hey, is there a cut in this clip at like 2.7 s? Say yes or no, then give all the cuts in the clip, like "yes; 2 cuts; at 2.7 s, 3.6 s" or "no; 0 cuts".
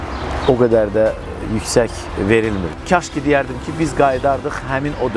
yes; 1 cut; at 2.7 s